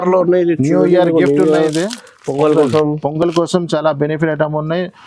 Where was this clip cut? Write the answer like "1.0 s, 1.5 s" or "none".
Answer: none